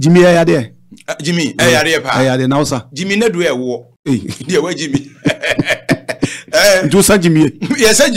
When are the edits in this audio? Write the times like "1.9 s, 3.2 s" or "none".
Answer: 3.9 s